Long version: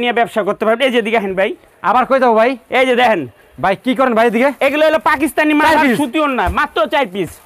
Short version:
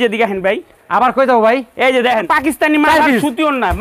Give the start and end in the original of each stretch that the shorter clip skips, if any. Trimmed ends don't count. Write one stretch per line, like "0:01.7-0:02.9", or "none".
0:03.2-0:05.0